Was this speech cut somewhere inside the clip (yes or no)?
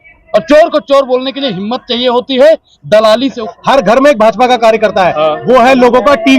yes